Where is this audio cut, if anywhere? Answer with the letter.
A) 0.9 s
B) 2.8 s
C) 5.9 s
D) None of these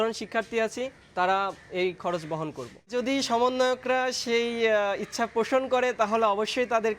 B